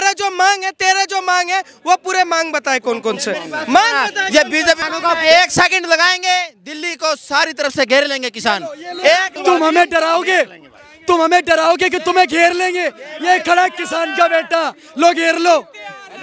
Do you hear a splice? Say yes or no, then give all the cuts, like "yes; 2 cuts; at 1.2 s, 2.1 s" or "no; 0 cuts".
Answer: yes; 2 cuts; at 4.8 s, 9.3 s